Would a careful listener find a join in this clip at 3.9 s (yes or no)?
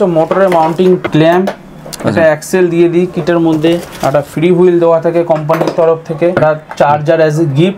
yes